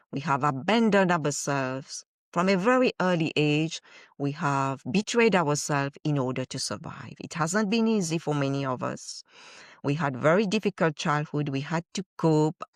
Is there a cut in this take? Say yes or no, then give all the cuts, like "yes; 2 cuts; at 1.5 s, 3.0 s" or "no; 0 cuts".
no; 0 cuts